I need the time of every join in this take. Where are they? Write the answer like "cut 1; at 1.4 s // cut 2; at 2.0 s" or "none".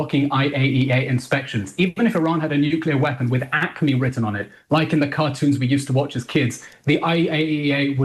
cut 1; at 1.7 s